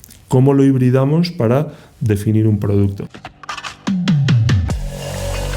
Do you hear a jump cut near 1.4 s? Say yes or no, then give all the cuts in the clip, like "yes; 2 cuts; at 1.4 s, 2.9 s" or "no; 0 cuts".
no; 1 cut; at 3.0 s